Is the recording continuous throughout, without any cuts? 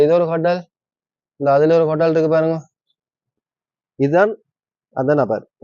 no; 1 cut; at 3.4 s

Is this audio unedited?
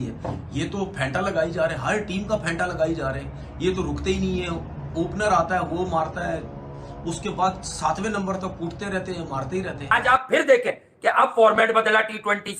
no; 1 cut; at 9.9 s

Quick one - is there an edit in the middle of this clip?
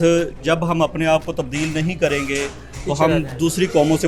no; 0 cuts

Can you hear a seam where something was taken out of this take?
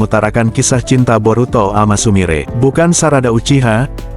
yes; 1 cut; at 2.5 s

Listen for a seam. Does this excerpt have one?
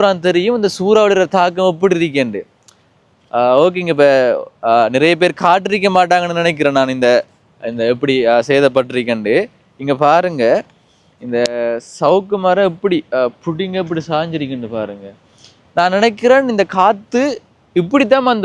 no; 0 cuts

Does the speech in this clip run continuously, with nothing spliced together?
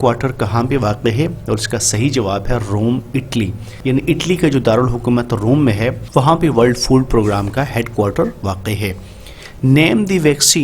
no; 2 cuts; at 3.6 s, 6.0 s

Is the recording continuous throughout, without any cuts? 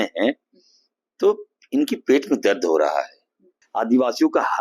no; 1 cut; at 3.6 s

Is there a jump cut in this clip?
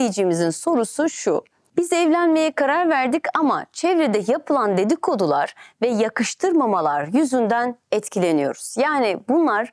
yes; 1 cut; at 1.6 s

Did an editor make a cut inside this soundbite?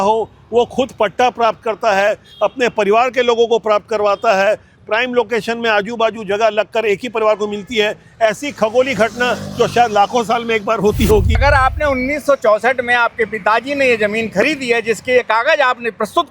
yes; 1 cut; at 11.4 s

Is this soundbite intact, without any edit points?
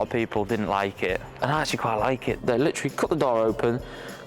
no; 2 cuts; at 1.3 s, 2.4 s

